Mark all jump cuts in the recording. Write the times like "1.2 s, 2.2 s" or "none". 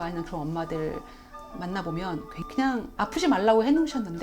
2.4 s